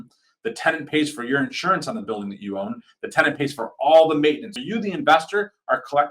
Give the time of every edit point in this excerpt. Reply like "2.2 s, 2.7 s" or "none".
4.5 s